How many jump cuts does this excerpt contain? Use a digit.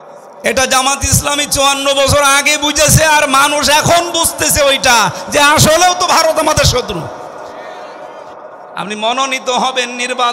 1